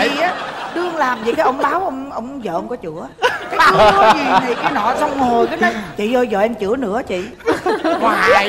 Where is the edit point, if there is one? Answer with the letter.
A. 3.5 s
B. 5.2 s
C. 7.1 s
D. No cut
D